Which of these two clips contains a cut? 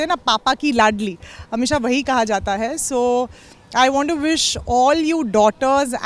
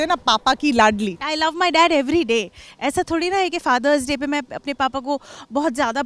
second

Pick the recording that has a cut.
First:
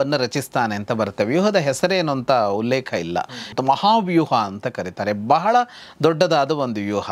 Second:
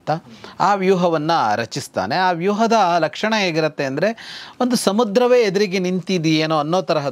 first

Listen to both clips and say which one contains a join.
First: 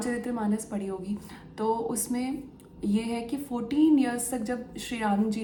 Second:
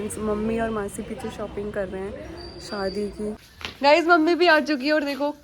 second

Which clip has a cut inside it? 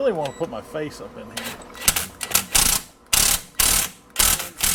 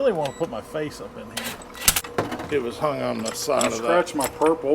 second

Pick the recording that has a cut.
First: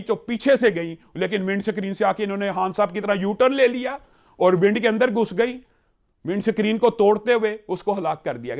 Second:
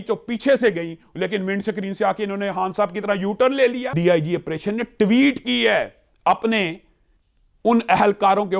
second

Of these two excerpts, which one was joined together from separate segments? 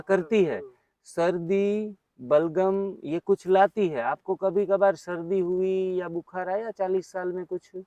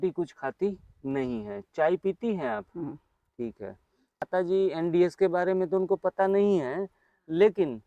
second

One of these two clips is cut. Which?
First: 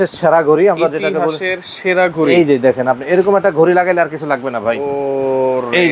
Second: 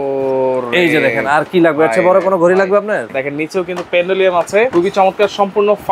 second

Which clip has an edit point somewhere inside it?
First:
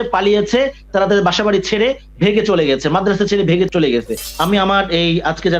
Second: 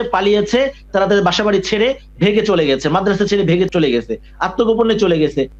first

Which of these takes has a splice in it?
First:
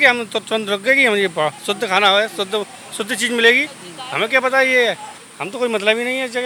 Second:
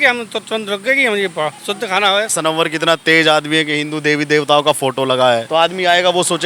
second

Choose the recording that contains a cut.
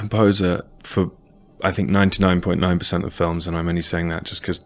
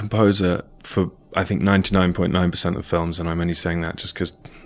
second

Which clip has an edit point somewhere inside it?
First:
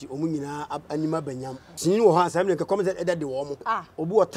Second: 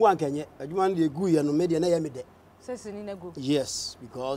first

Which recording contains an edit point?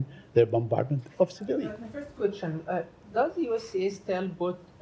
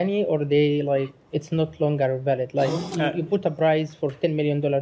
first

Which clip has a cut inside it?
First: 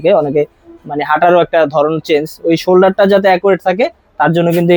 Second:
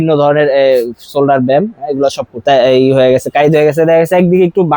second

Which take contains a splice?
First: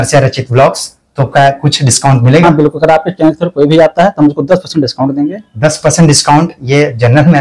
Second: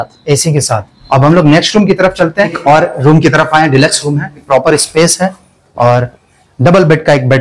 second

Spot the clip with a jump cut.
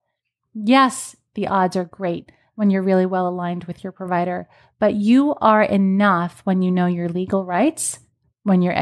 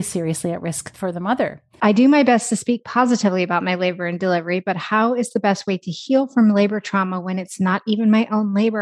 second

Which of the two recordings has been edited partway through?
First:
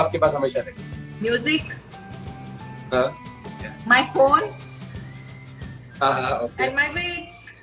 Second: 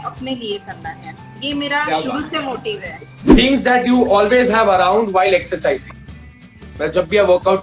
second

